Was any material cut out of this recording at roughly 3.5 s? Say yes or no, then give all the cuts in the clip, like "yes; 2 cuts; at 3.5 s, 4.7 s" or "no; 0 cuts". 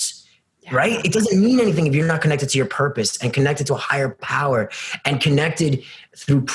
no; 0 cuts